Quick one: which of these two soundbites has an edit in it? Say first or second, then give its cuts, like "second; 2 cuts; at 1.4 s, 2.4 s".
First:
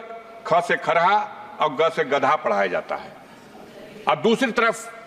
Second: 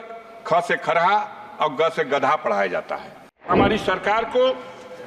second; 1 cut; at 3.5 s